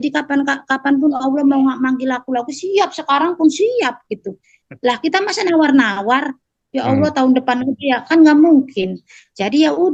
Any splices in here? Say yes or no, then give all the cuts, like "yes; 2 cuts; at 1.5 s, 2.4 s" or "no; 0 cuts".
no; 0 cuts